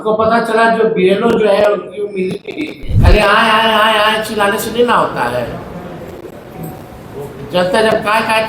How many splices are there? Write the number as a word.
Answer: one